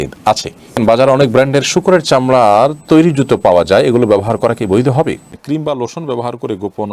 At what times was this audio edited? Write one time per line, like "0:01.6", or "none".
0:00.8
0:05.3